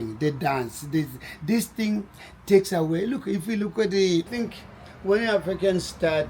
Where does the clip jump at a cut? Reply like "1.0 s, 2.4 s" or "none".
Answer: 4.4 s